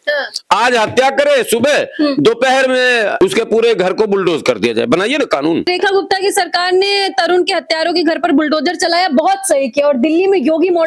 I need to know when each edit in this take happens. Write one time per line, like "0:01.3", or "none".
none